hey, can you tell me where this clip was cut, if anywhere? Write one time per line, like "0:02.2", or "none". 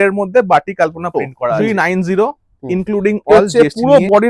0:01.6
0:03.3